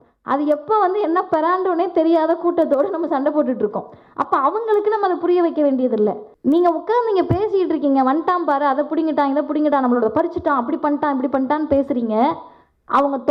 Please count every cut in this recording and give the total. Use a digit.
1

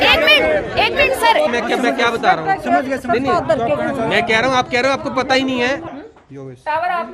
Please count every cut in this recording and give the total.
2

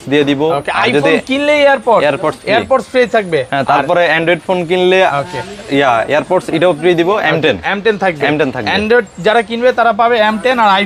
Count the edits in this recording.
0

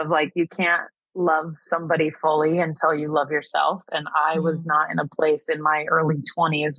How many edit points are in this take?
0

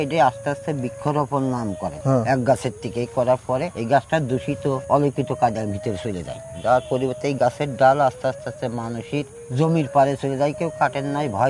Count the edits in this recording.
4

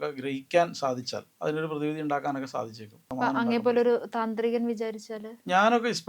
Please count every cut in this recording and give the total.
2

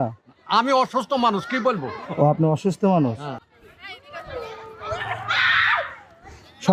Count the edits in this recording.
2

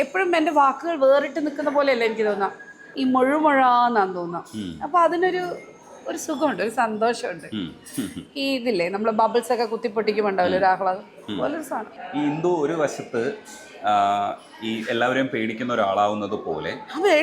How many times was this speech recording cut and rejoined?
0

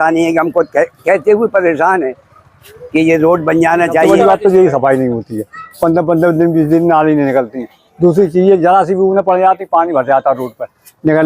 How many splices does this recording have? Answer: 1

